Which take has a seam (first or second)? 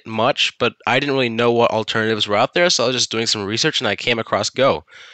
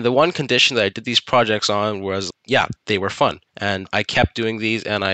second